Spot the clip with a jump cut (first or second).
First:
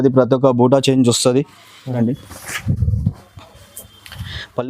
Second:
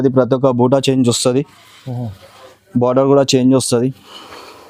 first